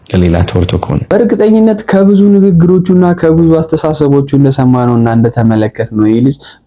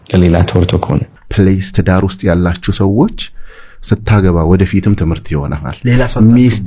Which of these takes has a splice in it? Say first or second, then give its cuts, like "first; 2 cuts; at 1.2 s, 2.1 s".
second; 1 cut; at 1.0 s